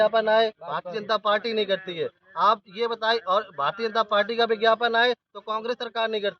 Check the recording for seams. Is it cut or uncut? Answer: uncut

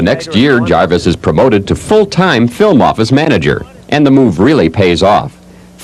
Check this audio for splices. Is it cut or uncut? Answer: uncut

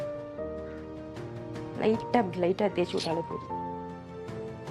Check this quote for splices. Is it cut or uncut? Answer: uncut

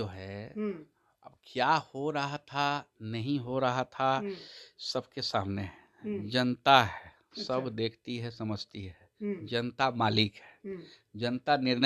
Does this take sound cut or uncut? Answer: uncut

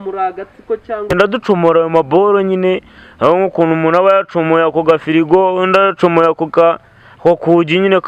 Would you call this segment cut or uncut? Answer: cut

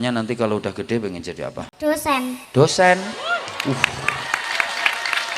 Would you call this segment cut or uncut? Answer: cut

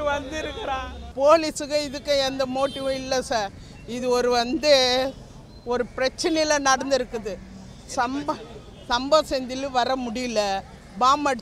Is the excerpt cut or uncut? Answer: cut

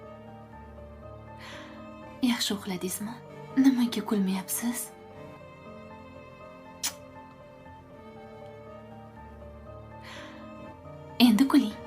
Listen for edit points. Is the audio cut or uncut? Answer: cut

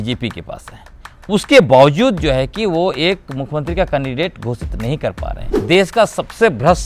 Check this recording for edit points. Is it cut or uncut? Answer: cut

